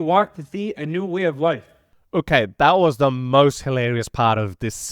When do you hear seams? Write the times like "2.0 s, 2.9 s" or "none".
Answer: 1.7 s